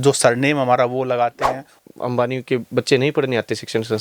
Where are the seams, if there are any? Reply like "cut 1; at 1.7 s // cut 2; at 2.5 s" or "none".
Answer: cut 1; at 1.7 s